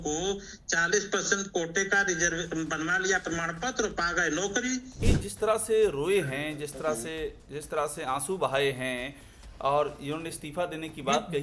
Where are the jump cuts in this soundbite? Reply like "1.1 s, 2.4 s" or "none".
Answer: 4.9 s